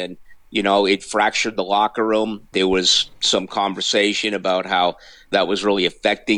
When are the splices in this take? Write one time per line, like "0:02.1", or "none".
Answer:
0:02.5
0:05.3